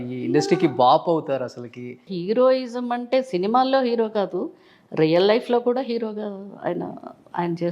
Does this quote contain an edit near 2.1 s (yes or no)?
yes